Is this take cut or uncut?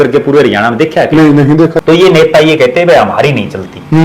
cut